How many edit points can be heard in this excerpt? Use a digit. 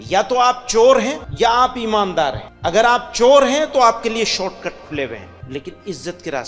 3